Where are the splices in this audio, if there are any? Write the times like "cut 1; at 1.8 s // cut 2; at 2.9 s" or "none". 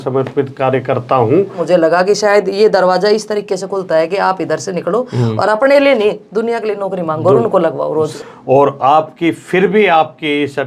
cut 1; at 1.6 s // cut 2; at 8.1 s

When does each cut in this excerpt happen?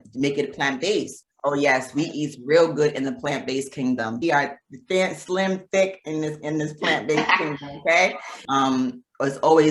cut 1; at 1.1 s // cut 2; at 4.2 s // cut 3; at 8.4 s

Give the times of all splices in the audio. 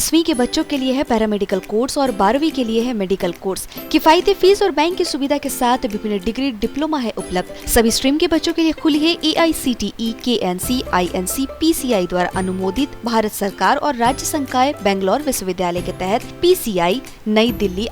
none

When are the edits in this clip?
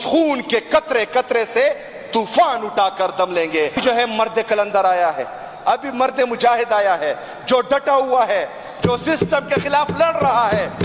cut 1; at 3.8 s

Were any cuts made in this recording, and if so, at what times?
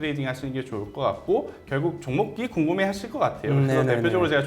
cut 1; at 2.3 s

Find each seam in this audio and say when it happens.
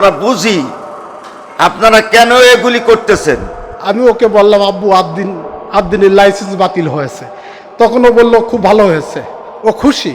cut 1; at 3.8 s

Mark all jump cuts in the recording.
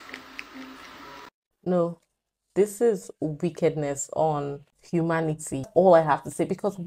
cut 1; at 5.7 s

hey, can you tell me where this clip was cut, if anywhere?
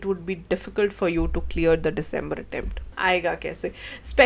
cut 1; at 2.9 s

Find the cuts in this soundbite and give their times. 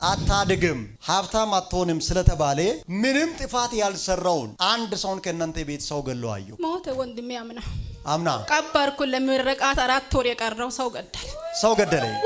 none

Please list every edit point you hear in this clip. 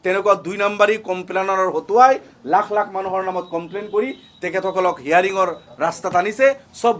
none

